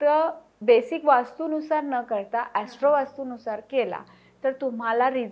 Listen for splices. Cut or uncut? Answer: uncut